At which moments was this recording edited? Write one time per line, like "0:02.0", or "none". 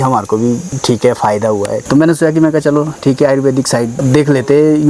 none